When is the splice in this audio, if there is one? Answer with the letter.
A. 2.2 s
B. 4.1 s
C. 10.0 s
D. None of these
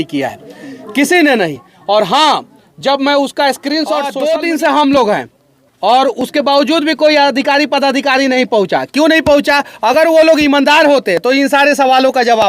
B